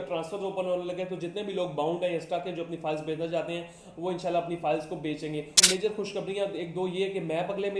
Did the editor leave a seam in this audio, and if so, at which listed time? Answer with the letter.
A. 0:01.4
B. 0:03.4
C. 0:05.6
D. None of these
C